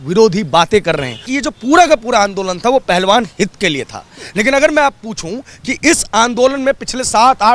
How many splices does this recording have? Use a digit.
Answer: 1